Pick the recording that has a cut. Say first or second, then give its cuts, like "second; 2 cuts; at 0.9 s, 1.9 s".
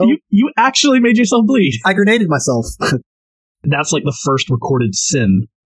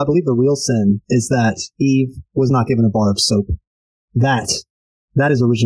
first; 1 cut; at 3.1 s